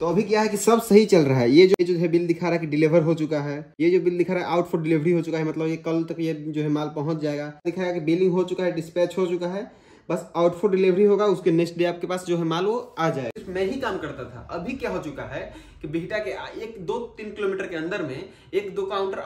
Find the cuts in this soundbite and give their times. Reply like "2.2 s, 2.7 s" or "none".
1.7 s, 3.6 s, 7.6 s, 13.3 s

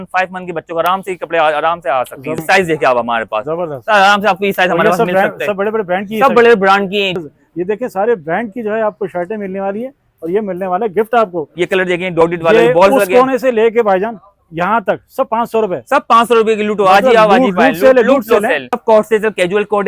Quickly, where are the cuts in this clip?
2.4 s, 7.2 s, 11.4 s, 18.8 s

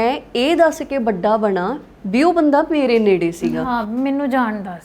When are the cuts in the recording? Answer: none

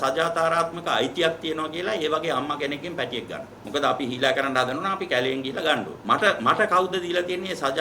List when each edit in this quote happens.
3.5 s, 5.9 s

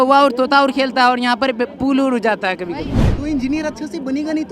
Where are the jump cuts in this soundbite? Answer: 3.0 s

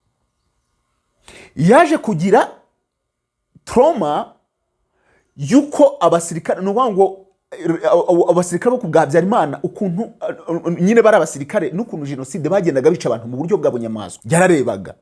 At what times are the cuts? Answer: 14.1 s

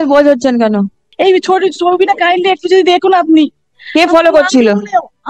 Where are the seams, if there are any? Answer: 1.0 s

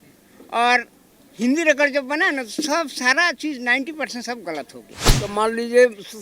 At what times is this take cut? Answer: 5.2 s

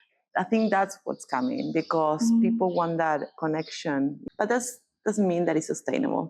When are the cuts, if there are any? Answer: 4.2 s

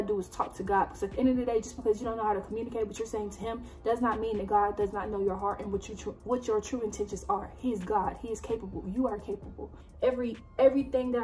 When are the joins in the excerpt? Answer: 9.7 s

